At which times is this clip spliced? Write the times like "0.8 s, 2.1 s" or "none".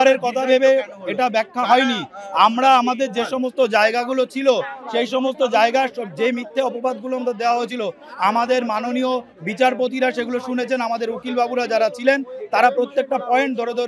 none